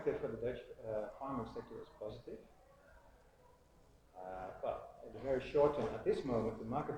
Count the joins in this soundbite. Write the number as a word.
zero